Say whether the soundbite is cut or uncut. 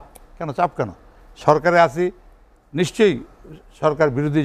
uncut